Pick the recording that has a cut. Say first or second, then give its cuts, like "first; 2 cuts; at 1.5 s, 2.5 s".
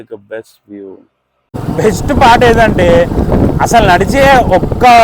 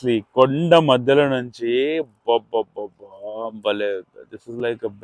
first; 1 cut; at 1.5 s